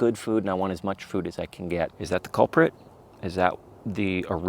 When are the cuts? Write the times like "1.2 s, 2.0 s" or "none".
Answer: 2.0 s